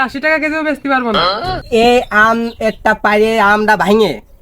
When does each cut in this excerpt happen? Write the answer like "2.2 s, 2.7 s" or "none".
1.6 s